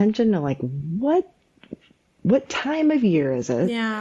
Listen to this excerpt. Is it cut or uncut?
uncut